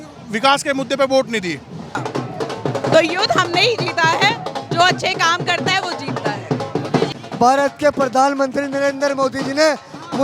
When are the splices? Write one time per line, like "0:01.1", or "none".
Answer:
0:02.0
0:07.2